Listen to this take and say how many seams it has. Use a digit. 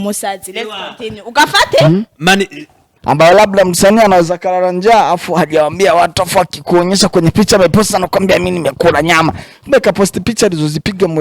1